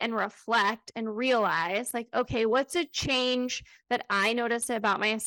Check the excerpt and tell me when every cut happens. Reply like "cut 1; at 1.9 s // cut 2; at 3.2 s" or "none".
none